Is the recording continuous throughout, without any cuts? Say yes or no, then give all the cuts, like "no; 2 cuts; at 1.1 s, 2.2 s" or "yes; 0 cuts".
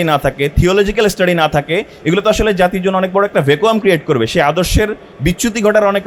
yes; 0 cuts